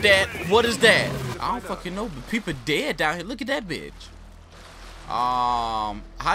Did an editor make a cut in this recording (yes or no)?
yes